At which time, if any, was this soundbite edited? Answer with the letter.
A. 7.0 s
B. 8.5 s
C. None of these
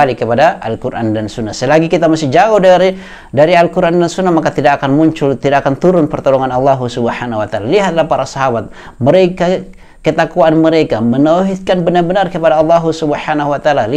C